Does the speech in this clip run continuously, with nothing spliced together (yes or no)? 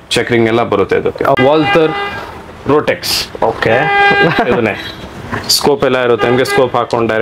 no